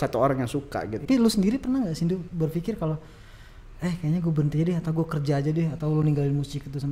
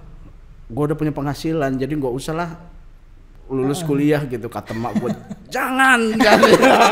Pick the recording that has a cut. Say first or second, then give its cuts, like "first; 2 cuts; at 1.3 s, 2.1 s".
first; 1 cut; at 1.0 s